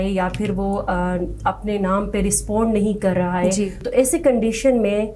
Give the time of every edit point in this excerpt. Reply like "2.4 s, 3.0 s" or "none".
3.8 s